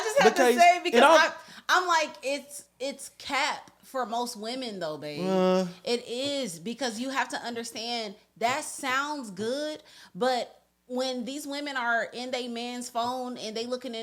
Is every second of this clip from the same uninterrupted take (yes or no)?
yes